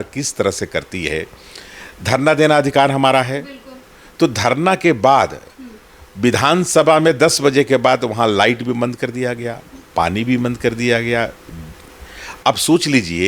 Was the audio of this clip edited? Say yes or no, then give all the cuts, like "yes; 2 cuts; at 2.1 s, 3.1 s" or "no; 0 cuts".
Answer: no; 0 cuts